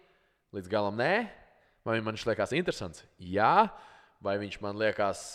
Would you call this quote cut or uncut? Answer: uncut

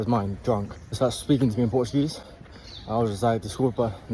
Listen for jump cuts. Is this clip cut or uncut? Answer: cut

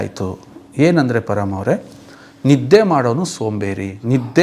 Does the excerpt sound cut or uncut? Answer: uncut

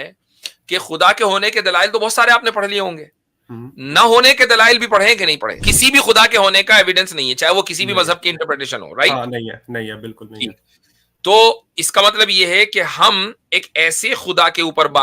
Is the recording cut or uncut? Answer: cut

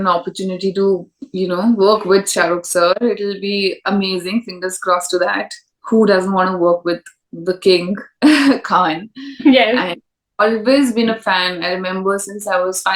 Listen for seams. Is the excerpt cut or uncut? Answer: uncut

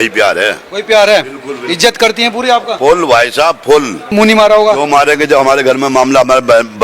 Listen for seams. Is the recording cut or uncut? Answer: cut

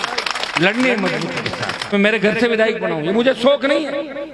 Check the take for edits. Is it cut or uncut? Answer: cut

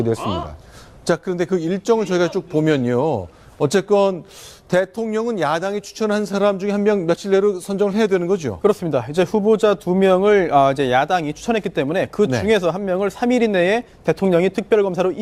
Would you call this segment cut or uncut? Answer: uncut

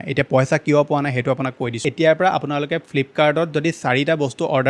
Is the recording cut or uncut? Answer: cut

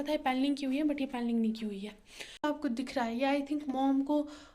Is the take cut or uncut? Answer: cut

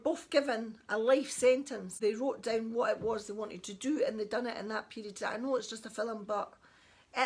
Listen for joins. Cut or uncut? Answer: cut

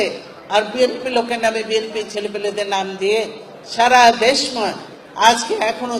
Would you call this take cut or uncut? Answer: uncut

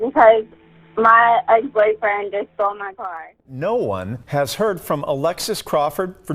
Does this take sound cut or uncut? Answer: cut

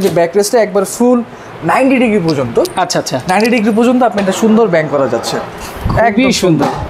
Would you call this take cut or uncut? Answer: uncut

